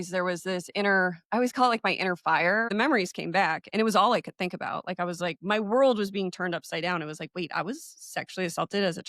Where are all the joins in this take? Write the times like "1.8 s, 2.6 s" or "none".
2.7 s

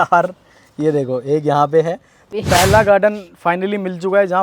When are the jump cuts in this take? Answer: 2.3 s

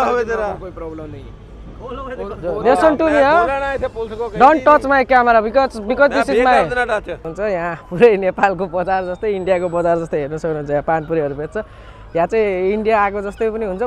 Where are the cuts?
7.1 s

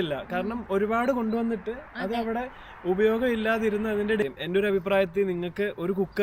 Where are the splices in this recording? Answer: 4.2 s

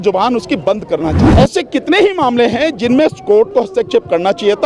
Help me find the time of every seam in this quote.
1.2 s

